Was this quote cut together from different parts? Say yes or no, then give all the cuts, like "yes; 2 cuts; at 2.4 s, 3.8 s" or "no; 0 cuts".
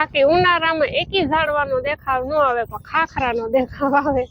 no; 0 cuts